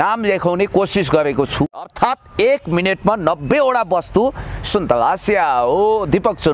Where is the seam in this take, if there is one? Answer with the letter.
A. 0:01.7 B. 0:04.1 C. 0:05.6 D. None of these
A